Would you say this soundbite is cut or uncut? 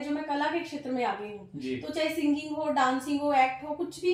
uncut